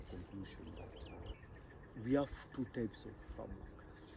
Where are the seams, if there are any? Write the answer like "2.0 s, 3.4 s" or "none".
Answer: 1.3 s